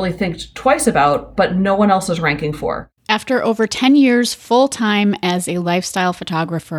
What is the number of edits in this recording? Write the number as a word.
one